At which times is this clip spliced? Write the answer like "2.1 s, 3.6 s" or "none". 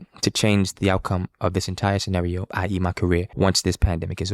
2.5 s, 3.3 s